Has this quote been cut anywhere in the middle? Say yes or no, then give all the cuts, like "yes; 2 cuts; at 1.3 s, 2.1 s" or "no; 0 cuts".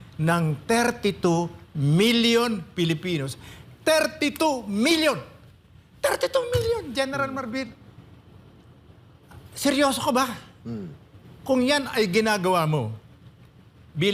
no; 0 cuts